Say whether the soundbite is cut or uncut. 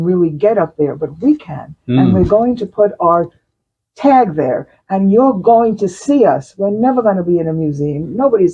uncut